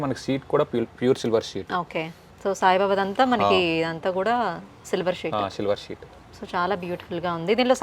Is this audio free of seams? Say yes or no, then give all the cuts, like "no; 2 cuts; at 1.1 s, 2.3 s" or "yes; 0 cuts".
yes; 0 cuts